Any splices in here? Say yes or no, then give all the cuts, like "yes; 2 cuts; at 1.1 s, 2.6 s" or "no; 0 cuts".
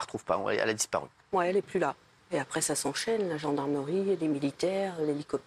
yes; 1 cut; at 2.1 s